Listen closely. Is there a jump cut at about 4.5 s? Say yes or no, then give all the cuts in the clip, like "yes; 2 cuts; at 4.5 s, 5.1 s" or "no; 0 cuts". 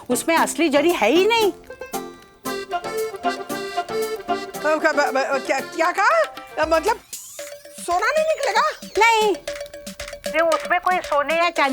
yes; 3 cuts; at 1.6 s, 4.5 s, 9.6 s